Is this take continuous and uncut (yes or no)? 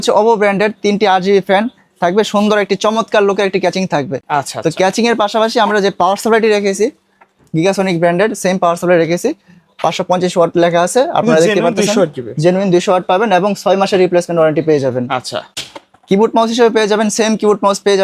yes